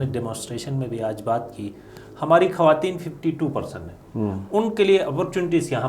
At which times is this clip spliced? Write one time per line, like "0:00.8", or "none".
none